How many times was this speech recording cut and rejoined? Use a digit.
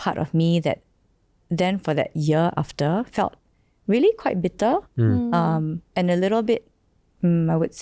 0